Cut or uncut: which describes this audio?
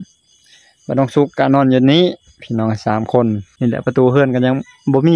cut